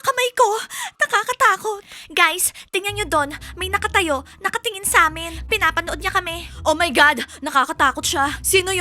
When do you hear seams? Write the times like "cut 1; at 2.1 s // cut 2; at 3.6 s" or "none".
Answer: cut 1; at 1.9 s